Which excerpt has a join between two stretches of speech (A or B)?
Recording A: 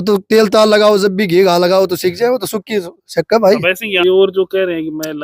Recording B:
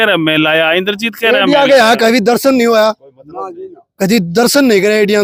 A